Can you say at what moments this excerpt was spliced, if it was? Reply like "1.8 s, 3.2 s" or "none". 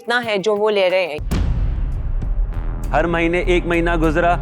1.2 s